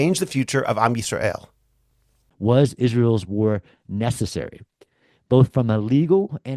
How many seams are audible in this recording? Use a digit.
1